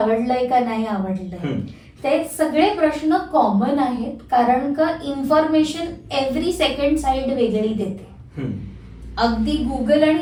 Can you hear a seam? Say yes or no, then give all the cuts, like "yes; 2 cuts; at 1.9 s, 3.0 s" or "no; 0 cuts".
no; 0 cuts